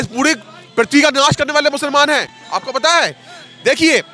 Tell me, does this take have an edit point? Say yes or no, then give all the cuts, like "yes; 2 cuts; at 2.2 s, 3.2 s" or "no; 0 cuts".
no; 0 cuts